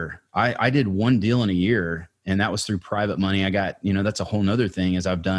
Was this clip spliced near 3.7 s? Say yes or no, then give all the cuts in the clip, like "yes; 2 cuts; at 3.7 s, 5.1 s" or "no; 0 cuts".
no; 0 cuts